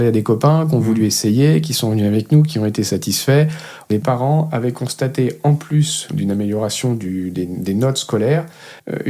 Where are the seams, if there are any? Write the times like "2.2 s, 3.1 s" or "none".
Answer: 3.9 s, 6.0 s